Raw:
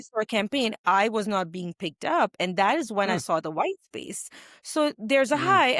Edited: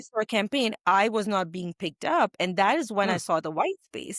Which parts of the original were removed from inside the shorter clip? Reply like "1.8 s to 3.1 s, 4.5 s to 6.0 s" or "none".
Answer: none